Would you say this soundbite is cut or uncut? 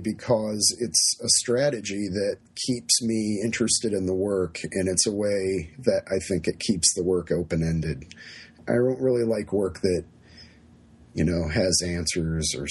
cut